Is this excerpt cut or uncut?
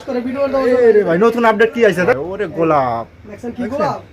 cut